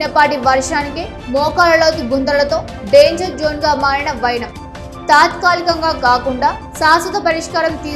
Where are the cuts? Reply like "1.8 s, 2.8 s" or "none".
none